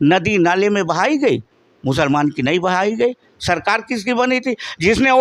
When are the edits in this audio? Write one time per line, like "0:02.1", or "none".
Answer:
none